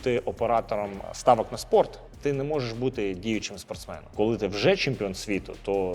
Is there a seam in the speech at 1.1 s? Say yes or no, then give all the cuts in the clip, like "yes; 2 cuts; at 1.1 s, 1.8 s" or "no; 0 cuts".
yes; 2 cuts; at 1.1 s, 4.1 s